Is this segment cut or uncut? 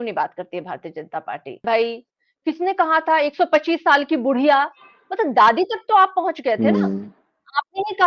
cut